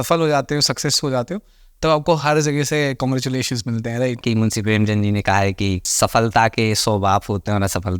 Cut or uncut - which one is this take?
cut